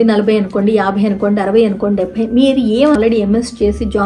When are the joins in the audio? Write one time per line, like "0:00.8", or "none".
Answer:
0:02.9